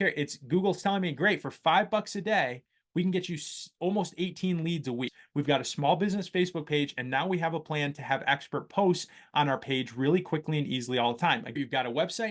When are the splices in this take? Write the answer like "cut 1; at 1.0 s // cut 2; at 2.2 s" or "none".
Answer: cut 1; at 5.2 s // cut 2; at 11.6 s